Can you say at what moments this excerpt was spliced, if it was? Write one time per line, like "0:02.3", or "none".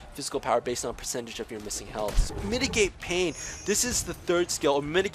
0:02.3